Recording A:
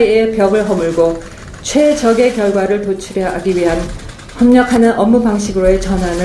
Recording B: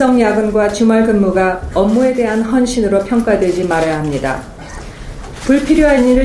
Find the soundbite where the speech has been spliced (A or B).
B